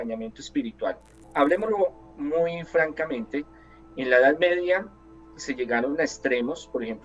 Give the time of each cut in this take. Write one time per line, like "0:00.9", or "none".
0:01.2